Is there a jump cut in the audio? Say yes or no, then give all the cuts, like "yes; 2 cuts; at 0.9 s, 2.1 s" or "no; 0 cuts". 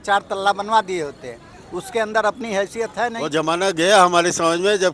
yes; 1 cut; at 3.2 s